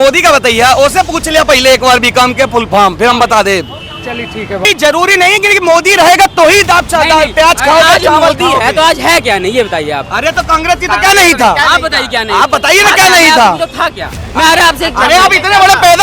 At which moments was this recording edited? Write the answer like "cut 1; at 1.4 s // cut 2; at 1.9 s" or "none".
cut 1; at 4.6 s